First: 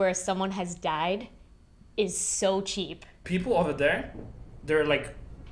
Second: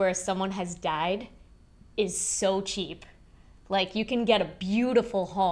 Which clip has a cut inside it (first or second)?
first